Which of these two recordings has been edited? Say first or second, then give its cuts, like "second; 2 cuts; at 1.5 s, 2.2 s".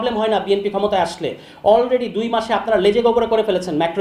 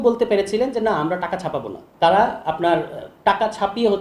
second; 1 cut; at 1.8 s